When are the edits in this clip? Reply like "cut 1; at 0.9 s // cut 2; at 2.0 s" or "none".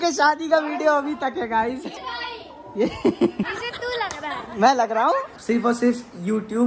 cut 1; at 1.9 s // cut 2; at 3.6 s // cut 3; at 5.3 s